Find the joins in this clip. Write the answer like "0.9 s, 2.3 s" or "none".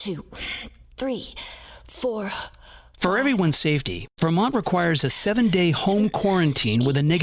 1.0 s

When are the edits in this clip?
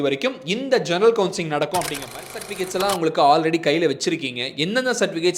2.2 s

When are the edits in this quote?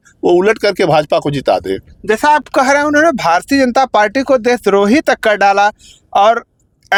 none

